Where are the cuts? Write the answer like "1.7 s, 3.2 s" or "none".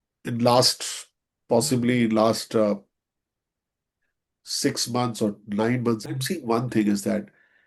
6.0 s